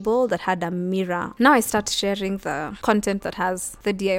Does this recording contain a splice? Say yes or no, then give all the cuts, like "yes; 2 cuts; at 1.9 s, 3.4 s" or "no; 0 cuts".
yes; 2 cuts; at 1.3 s, 2.7 s